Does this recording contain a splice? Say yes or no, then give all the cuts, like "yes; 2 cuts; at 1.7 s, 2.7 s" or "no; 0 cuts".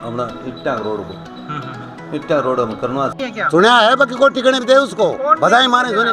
yes; 1 cut; at 3.2 s